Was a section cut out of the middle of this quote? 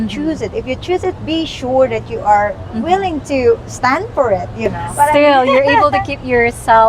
yes; 1 cut; at 4.8 s

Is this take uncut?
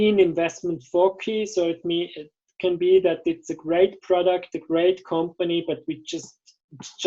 yes; 0 cuts

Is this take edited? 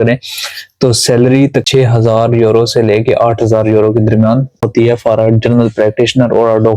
yes; 2 cuts; at 1.7 s, 4.6 s

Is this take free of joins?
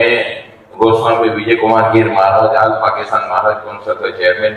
yes; 0 cuts

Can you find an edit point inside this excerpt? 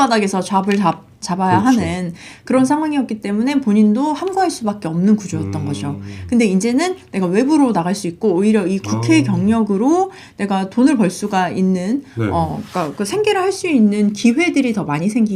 no; 0 cuts

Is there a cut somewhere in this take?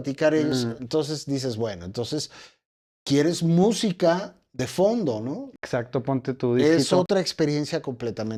no; 0 cuts

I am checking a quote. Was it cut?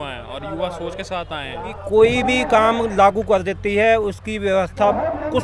yes; 1 cut; at 1.7 s

